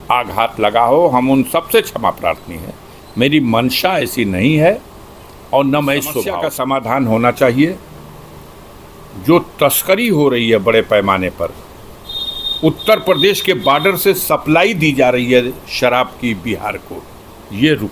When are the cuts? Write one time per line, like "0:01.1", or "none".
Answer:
0:06.4